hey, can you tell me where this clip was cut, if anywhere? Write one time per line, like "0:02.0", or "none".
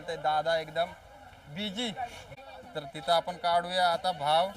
0:02.3